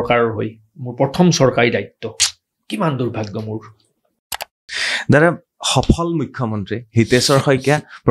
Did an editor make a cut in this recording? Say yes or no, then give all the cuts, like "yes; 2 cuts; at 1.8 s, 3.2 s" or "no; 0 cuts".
yes; 1 cut; at 4.6 s